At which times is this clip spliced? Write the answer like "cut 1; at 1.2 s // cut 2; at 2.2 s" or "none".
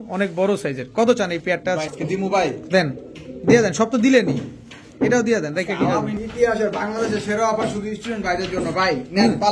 cut 1; at 1.9 s // cut 2; at 6.2 s